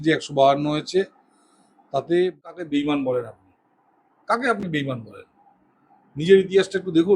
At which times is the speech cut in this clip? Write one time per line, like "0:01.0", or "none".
0:02.4